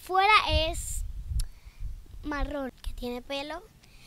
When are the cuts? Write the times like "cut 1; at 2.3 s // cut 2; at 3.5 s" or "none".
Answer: cut 1; at 2.7 s